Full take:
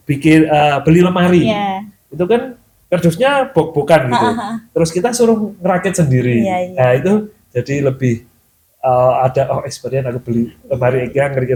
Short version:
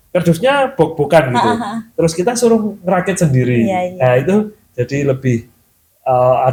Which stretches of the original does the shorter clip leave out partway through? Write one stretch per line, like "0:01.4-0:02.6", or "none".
none